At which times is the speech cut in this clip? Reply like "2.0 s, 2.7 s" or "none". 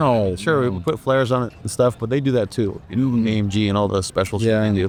none